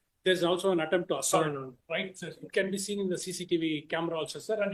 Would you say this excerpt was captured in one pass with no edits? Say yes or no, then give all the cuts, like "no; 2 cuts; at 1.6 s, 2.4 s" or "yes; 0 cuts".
yes; 0 cuts